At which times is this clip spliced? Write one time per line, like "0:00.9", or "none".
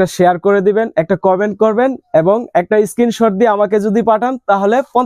none